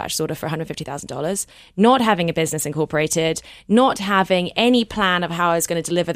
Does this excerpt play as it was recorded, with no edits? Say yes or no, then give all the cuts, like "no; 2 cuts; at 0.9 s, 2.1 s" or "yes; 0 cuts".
yes; 0 cuts